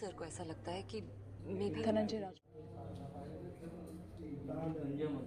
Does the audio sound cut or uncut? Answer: uncut